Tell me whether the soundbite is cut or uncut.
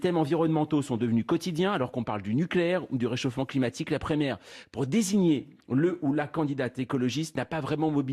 cut